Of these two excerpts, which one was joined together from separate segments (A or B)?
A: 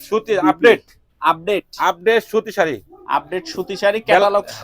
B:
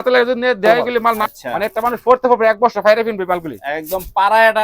B